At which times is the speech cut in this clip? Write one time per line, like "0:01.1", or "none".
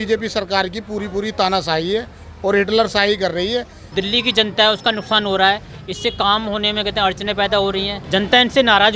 0:03.8
0:08.0